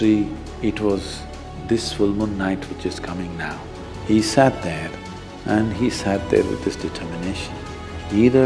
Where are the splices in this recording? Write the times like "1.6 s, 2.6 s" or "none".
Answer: 3.9 s